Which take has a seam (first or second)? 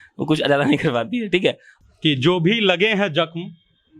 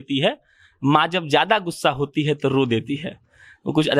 first